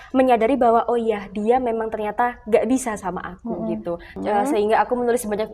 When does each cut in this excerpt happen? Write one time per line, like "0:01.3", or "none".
0:04.1